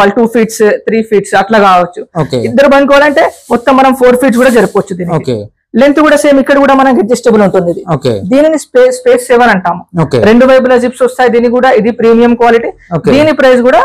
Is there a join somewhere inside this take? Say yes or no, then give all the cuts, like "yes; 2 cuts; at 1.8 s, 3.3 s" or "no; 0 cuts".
no; 0 cuts